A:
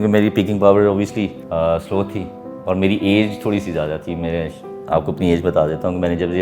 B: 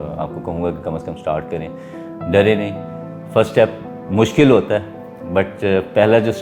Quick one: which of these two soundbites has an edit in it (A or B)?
A